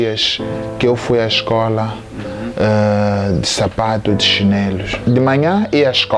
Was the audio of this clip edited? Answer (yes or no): yes